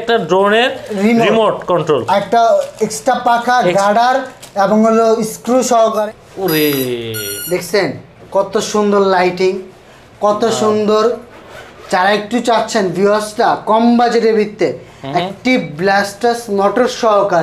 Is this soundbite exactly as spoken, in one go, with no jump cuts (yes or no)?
no